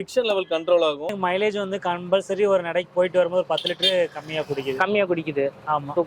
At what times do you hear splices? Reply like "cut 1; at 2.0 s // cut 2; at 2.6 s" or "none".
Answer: cut 1; at 1.2 s